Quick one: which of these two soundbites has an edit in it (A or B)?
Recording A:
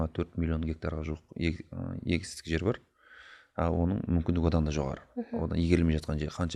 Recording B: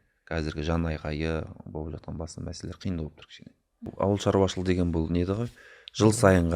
B